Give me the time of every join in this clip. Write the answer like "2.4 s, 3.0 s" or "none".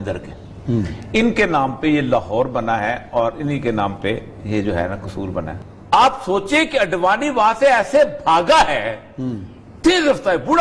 5.6 s